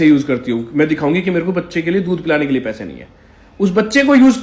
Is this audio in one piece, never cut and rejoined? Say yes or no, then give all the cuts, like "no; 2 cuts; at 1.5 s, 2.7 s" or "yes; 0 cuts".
yes; 0 cuts